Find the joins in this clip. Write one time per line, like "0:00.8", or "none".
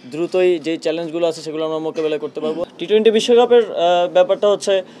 0:02.6